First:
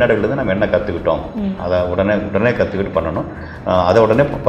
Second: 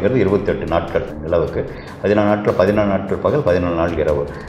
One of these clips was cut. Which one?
second; 1 cut; at 1.1 s

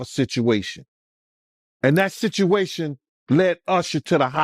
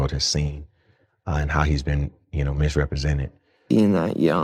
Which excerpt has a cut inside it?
second; 1 cut; at 3.5 s

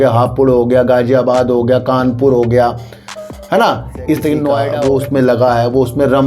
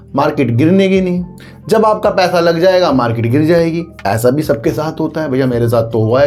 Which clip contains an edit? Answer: first; 1 cut; at 4.7 s

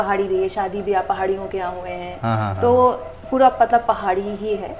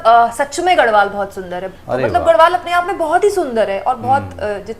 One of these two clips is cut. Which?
second; 1 cut; at 1.6 s

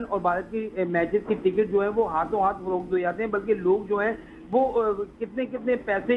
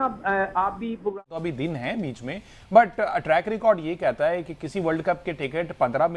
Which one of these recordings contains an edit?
second; 1 cut; at 1.2 s

